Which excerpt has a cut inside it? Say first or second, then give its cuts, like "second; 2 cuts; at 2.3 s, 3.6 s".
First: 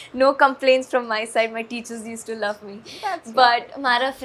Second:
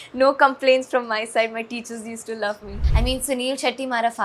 second; 1 cut; at 2.8 s